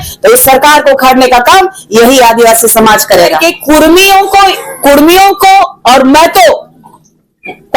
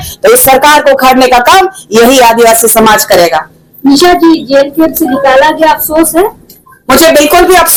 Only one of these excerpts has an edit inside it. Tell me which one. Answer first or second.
first